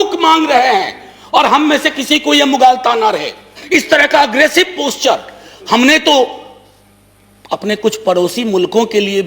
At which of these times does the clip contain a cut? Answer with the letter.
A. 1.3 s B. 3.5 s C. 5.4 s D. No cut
B